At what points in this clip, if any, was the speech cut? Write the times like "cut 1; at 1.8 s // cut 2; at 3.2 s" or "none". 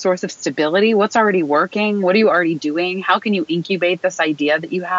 none